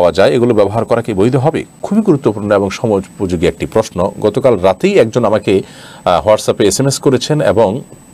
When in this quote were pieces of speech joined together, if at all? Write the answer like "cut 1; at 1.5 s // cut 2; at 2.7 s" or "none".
none